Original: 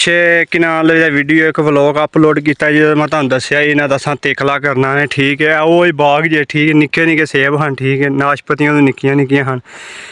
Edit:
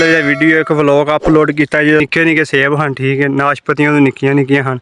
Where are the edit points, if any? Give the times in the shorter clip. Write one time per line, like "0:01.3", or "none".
0:02.0